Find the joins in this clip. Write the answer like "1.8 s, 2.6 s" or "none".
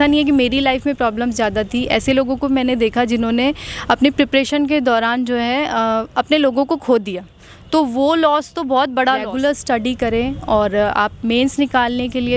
9.3 s